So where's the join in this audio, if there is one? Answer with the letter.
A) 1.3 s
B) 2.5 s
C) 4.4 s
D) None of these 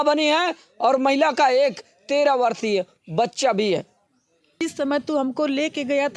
C